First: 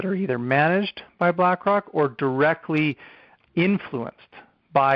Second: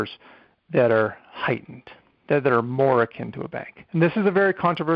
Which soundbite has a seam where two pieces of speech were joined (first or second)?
first